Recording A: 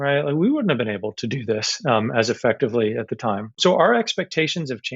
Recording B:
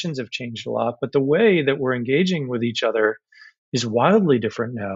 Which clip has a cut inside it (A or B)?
A